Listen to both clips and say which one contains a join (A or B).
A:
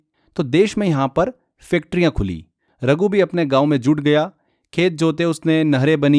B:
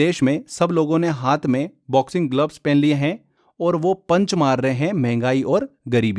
A